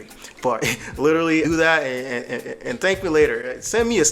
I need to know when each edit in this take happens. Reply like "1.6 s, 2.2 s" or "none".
none

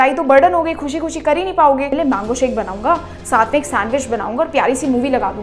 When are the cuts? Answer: 1.9 s

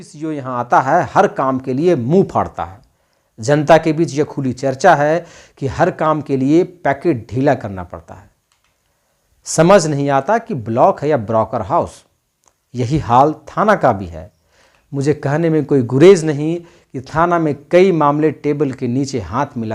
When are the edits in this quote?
none

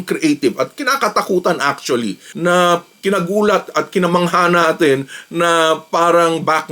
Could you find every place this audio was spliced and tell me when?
2.3 s

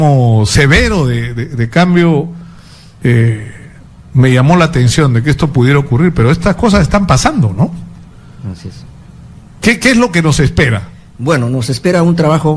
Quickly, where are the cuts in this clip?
2.3 s

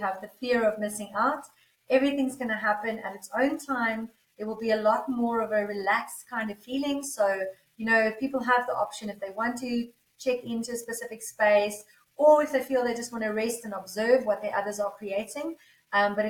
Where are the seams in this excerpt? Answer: none

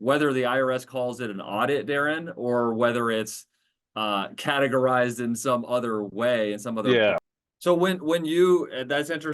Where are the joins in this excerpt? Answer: 7.4 s

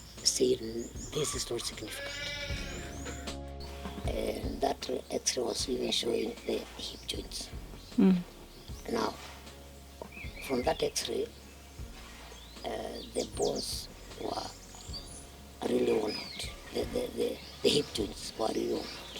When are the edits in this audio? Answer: 3.4 s

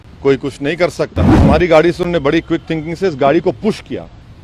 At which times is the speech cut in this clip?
1.4 s

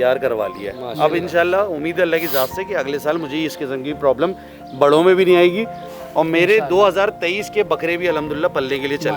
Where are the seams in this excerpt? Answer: none

